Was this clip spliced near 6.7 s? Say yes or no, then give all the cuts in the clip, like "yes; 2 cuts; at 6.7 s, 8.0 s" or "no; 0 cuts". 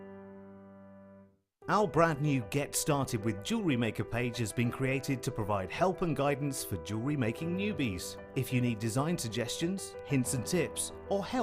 no; 1 cut; at 1.4 s